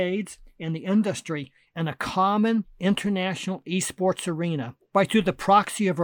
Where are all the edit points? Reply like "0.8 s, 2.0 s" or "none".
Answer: 2.7 s, 4.8 s